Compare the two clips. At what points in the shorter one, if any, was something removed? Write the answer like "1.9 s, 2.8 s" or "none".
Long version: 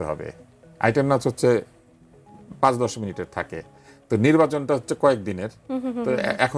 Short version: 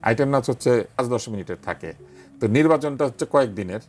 1.0 s

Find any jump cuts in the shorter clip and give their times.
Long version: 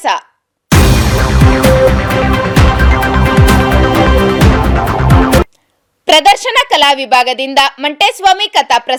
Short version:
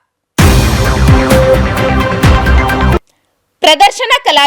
2.9 s

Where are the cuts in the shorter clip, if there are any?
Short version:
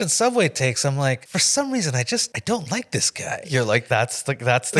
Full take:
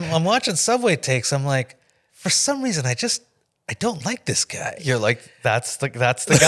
1.2 s, 2.3 s, 3.8 s

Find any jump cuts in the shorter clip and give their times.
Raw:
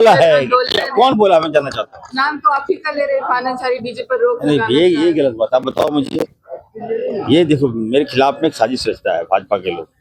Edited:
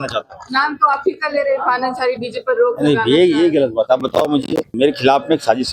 4.7 s

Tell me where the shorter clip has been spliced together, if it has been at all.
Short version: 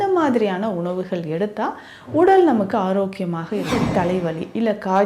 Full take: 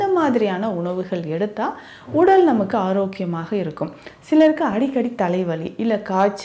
3.7 s

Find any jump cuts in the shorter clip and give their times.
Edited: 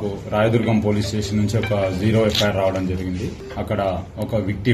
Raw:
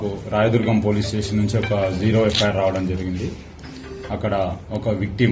3.4 s

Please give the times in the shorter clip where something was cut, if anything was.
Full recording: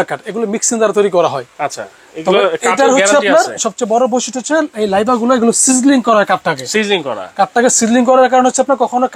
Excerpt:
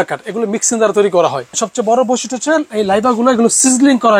1.5 s

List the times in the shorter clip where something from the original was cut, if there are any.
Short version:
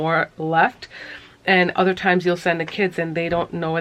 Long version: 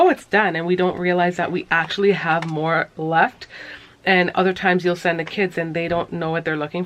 none

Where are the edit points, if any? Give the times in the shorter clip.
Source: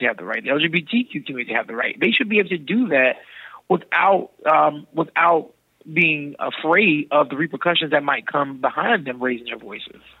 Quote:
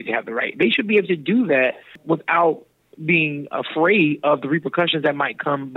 2.0 s

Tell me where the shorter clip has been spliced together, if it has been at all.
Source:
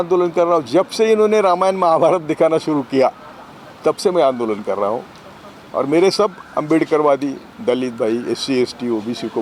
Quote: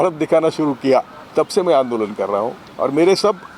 1.2 s, 2.6 s

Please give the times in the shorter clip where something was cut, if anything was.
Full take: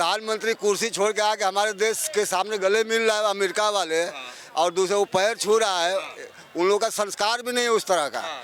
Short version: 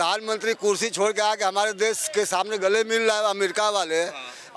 none

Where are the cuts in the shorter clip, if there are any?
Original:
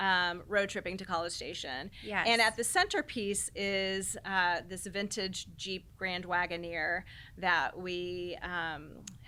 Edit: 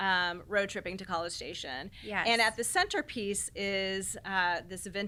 none

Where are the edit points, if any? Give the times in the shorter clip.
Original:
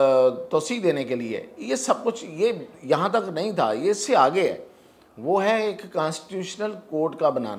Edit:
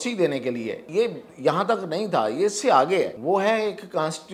0.8 s, 3.2 s

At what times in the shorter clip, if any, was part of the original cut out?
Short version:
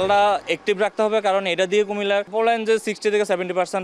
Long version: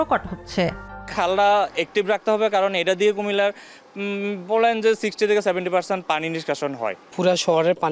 2.3 s

